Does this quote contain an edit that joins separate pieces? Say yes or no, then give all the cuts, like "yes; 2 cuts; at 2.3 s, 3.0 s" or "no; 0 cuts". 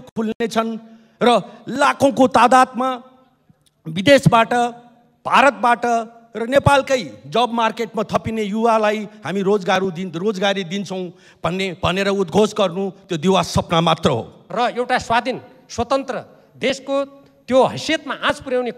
yes; 1 cut; at 14.4 s